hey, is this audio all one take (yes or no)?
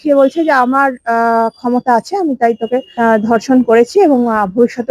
no